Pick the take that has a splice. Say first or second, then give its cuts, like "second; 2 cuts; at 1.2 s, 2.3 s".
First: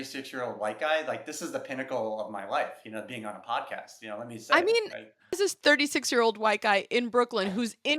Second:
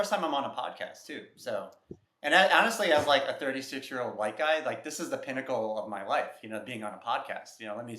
first; 1 cut; at 5.4 s